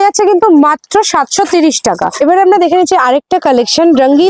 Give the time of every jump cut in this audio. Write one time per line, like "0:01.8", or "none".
0:02.1